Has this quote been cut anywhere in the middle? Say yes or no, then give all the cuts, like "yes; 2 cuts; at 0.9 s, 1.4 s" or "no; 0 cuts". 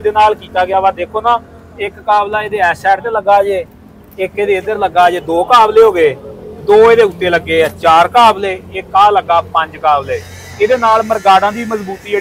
no; 0 cuts